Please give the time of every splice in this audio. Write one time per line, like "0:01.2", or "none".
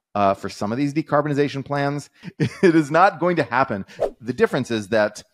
0:02.2
0:03.9